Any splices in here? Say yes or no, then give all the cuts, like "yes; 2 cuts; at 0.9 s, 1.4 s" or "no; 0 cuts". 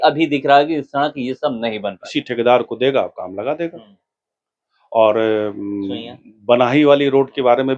yes; 1 cut; at 2.0 s